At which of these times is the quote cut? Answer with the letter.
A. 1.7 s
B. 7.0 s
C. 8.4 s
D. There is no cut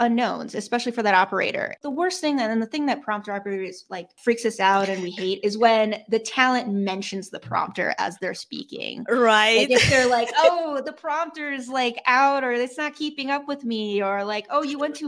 A